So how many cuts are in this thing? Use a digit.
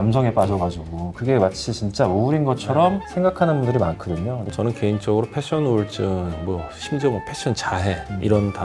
1